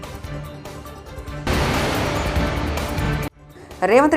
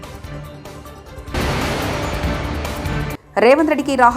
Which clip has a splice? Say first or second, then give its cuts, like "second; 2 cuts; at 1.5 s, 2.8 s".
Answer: first; 2 cuts; at 1.3 s, 3.3 s